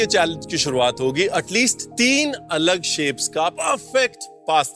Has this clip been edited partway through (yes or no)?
yes